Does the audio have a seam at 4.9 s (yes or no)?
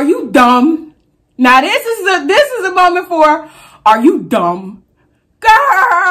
yes